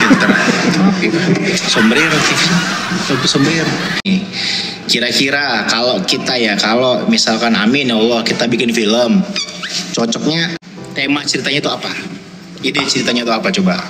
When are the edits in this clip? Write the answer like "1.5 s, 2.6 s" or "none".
4.0 s, 10.7 s